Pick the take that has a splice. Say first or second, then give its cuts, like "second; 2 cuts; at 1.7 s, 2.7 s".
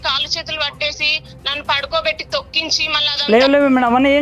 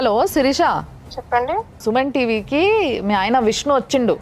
first; 1 cut; at 2.9 s